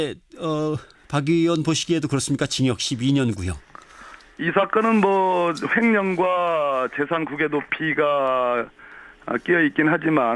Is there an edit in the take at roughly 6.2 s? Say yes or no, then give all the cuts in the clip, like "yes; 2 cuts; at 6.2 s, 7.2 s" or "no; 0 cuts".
yes; 1 cut; at 6.2 s